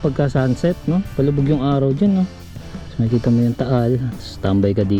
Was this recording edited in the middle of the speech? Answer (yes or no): no